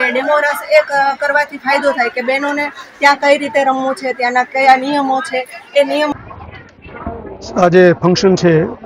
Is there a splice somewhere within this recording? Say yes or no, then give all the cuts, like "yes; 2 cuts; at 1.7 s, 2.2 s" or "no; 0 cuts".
yes; 1 cut; at 6.1 s